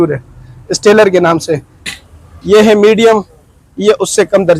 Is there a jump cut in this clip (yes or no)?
yes